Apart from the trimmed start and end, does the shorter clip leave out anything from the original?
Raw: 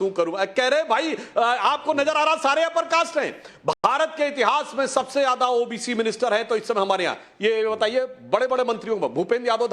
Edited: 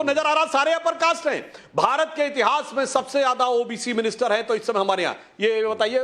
yes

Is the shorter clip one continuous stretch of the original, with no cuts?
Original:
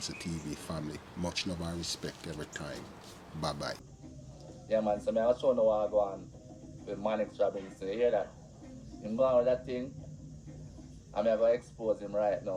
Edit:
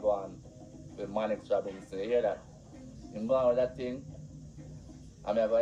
yes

